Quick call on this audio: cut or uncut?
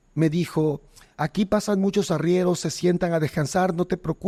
uncut